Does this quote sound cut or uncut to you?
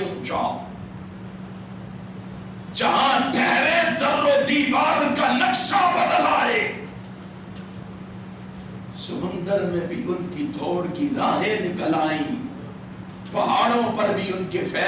uncut